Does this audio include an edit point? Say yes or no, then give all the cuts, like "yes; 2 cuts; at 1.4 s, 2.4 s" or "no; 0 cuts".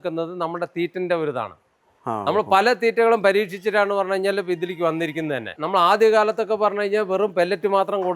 no; 0 cuts